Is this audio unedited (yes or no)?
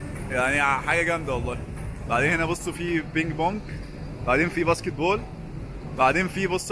yes